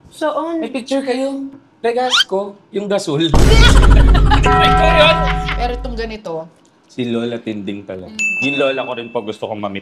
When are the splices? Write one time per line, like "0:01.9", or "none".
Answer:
0:05.4